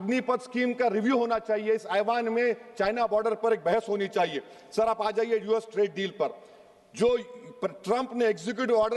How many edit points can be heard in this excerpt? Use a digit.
0